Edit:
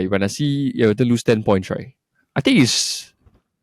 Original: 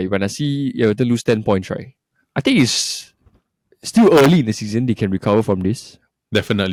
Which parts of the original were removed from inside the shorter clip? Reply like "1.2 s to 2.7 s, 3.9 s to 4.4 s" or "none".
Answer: none

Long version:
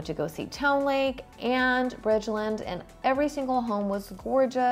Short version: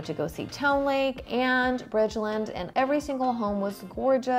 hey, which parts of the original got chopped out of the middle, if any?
1.2 s to 1.3 s, 2.7 s to 2.9 s

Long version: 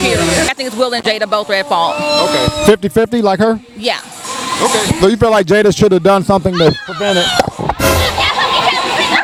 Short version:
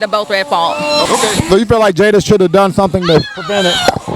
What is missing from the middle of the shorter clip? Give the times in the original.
2.3 s to 4.6 s

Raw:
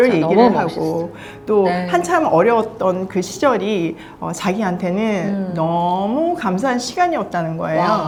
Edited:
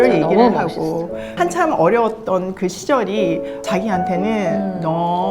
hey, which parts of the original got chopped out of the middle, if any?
1.3 s to 1.8 s, 4.1 s to 4.3 s

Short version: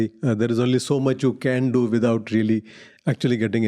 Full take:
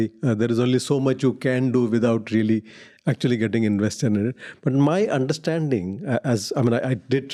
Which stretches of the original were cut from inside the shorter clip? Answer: none

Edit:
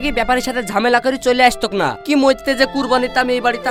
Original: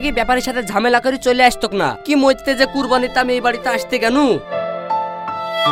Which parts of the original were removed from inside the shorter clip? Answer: none

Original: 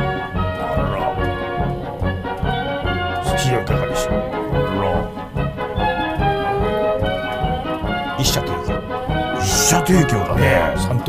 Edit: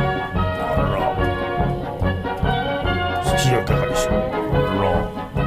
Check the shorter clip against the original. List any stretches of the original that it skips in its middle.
none

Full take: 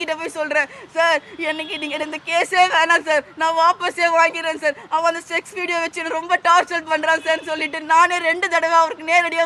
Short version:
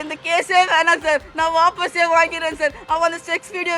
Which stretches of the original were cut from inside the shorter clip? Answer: none

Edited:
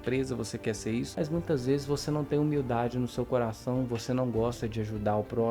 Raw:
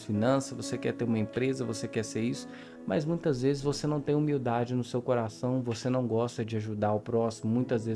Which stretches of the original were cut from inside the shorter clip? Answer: 2.5 s to 2.9 s

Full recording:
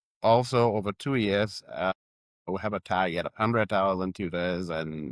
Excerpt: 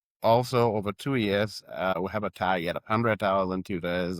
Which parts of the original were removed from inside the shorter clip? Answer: 2.0 s to 2.5 s

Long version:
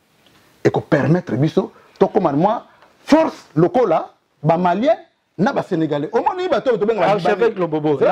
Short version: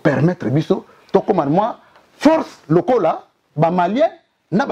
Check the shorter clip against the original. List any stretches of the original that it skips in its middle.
none

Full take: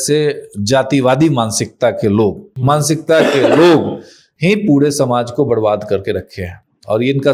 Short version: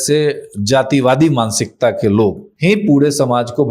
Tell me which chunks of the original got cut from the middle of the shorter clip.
2.5 s to 4.3 s

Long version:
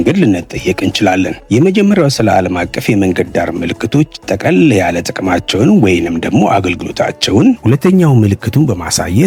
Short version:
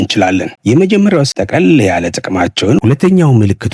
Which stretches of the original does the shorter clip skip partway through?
2.1 s to 4.2 s, 5.7 s to 7.6 s

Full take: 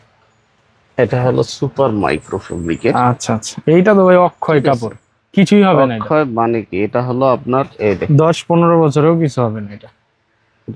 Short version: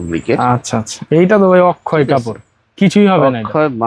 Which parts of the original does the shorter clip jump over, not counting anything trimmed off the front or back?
none

